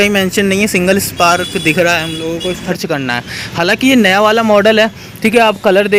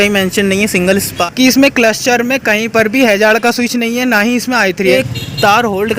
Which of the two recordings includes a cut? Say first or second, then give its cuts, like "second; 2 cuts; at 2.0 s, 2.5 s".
second; 2 cuts; at 1.1 s, 4.9 s